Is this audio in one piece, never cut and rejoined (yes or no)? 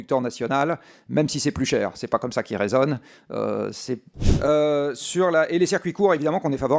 no